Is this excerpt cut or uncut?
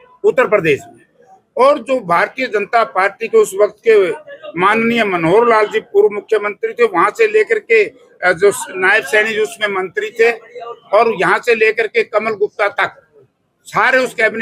uncut